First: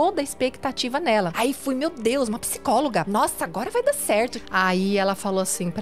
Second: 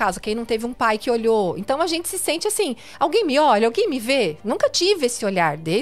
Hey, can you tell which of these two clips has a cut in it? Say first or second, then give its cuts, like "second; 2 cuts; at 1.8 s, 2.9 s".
first; 3 cuts; at 1.3 s, 3.1 s, 4.4 s